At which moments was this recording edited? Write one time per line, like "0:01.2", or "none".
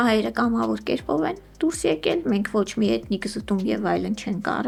none

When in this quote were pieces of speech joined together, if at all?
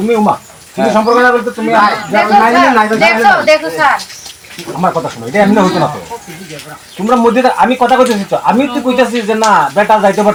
none

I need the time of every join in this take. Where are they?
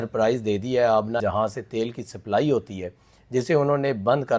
0:01.2

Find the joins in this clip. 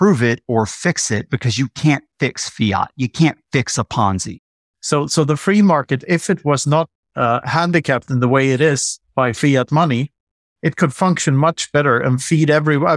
0:04.3
0:07.0

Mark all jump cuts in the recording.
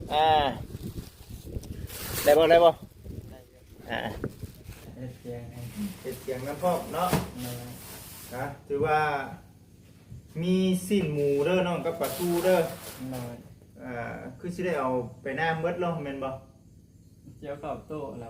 0:04.9

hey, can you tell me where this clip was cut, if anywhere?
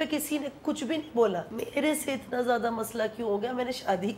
0:01.5

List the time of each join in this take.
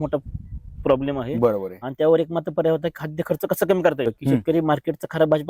0:04.1

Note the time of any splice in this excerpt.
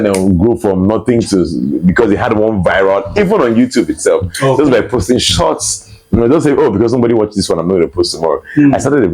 none

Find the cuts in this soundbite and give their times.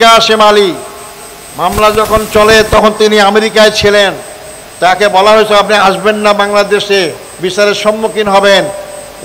none

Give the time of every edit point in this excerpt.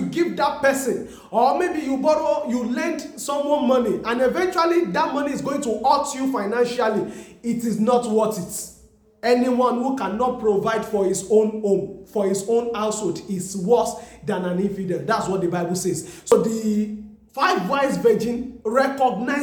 none

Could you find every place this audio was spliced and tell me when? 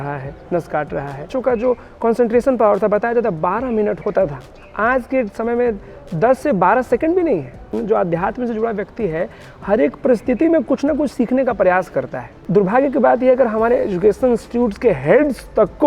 0:01.3
0:04.0
0:07.7
0:12.3

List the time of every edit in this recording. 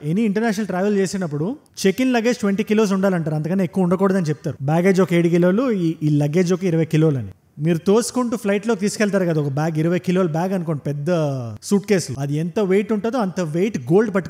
none

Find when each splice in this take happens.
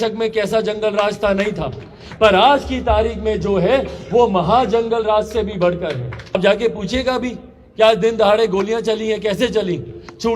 0:06.4

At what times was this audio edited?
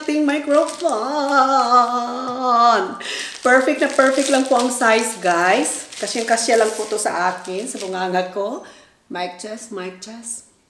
none

